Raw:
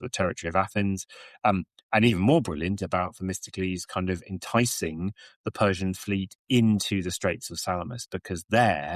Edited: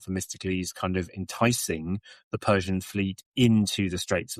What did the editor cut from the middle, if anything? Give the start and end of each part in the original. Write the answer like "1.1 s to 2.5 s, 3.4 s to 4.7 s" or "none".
none